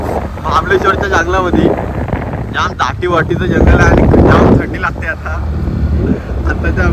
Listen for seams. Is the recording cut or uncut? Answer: uncut